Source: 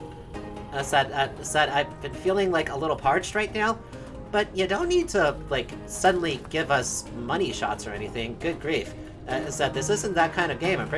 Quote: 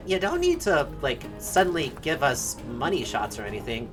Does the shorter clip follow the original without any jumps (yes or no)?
yes